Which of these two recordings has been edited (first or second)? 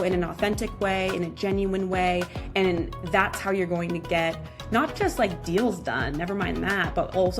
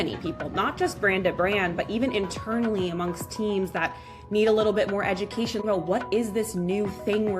second